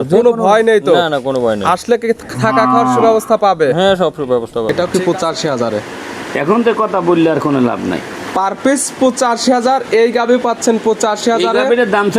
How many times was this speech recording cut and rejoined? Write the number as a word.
one